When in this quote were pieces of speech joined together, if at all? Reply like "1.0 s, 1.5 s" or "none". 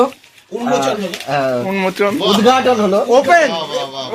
none